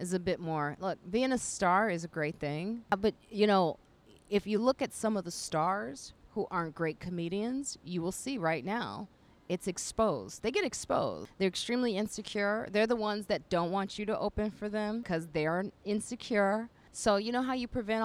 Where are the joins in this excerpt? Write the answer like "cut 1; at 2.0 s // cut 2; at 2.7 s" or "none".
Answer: cut 1; at 2.9 s // cut 2; at 11.2 s // cut 3; at 15.2 s // cut 4; at 16.8 s